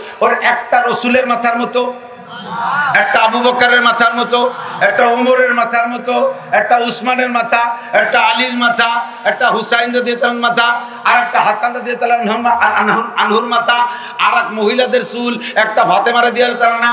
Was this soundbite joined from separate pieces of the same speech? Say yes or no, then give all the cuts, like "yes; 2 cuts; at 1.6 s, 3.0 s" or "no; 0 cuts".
no; 0 cuts